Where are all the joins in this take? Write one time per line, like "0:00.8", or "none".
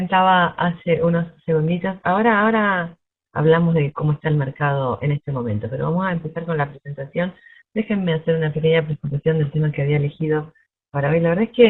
none